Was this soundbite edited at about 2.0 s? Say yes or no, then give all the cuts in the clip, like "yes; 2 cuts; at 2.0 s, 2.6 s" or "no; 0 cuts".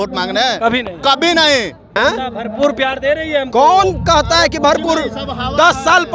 yes; 1 cut; at 2.0 s